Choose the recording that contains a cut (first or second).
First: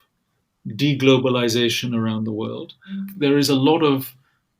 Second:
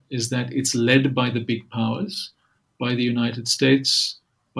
first